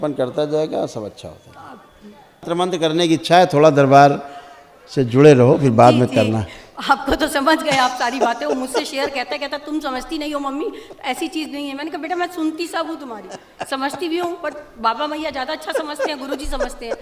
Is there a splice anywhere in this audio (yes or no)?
yes